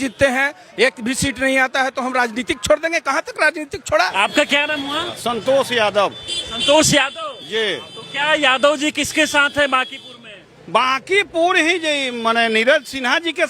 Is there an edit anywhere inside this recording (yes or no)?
yes